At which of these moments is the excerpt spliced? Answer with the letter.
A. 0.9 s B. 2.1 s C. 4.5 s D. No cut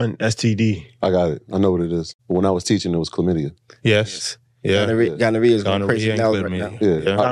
B